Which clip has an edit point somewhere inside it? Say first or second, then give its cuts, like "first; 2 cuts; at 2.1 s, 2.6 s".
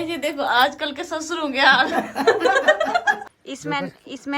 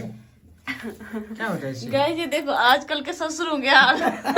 first; 1 cut; at 3.3 s